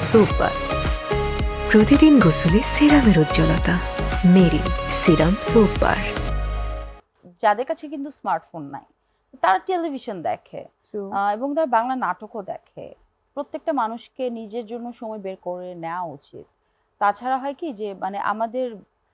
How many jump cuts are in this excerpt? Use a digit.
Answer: 2